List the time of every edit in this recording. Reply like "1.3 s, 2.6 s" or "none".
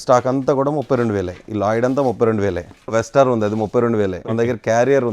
2.9 s, 4.2 s